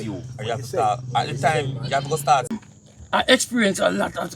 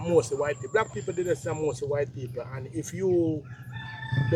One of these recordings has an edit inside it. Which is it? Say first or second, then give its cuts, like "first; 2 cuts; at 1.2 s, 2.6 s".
first; 1 cut; at 2.7 s